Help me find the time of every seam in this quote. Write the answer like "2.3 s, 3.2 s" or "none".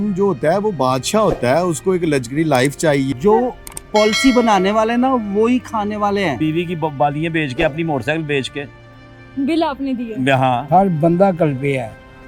3.1 s, 6.4 s, 10.6 s